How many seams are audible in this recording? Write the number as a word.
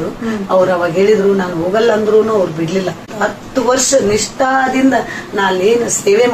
one